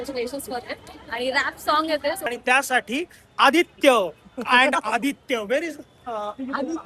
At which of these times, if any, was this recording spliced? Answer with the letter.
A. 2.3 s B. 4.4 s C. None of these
A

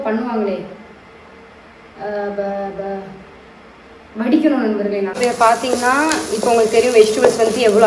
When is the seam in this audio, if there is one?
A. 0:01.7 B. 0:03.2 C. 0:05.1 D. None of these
C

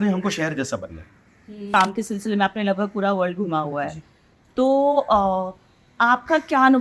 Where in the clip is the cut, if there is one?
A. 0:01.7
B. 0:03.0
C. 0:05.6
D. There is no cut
A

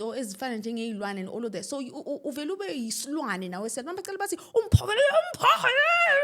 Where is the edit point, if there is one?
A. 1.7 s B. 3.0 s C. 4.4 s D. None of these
D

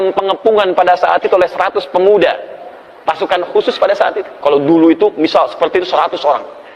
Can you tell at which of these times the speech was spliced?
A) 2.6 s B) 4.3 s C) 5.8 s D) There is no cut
B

